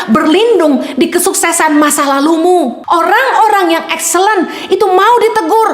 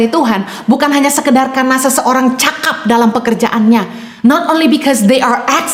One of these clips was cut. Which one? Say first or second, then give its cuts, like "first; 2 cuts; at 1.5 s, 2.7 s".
first; 1 cut; at 2.8 s